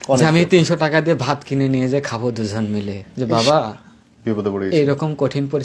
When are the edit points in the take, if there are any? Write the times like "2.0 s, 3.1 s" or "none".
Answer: 3.0 s